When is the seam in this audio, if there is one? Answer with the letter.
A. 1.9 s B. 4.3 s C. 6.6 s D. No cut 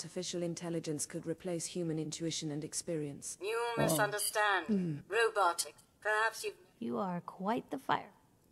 D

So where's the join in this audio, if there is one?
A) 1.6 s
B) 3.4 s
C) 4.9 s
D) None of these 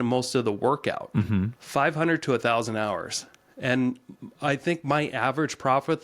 A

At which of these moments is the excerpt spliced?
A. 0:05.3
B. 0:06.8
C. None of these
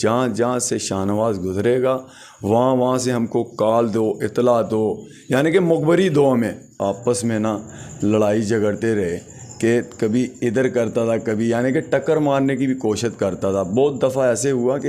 B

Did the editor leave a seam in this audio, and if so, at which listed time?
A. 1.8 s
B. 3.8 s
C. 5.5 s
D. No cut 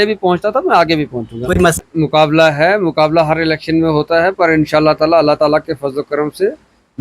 A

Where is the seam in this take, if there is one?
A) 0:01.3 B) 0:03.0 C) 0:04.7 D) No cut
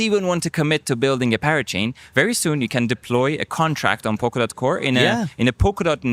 D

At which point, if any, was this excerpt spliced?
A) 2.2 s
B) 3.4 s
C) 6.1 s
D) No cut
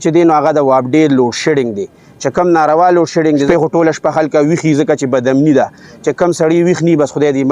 B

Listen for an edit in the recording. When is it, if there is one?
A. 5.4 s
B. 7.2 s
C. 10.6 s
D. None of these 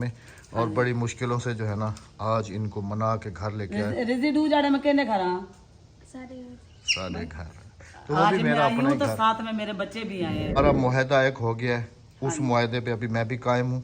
C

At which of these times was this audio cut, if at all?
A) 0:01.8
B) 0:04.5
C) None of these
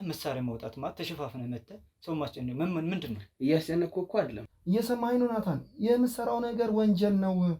B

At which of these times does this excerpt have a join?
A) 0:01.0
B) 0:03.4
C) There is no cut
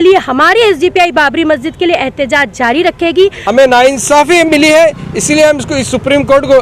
B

